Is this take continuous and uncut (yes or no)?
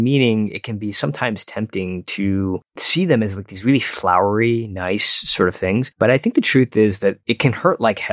no